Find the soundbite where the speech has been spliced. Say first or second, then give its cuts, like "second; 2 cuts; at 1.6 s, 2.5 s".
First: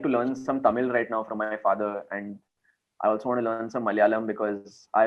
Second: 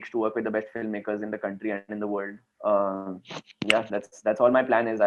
second; 1 cut; at 2.4 s